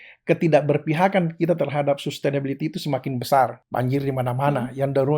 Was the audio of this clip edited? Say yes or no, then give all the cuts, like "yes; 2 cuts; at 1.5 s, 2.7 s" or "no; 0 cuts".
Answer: yes; 1 cut; at 3.6 s